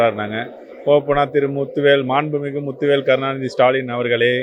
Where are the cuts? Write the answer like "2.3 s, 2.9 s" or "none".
none